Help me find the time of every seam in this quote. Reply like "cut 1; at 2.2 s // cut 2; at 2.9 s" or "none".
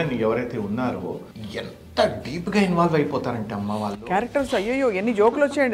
cut 1; at 1.3 s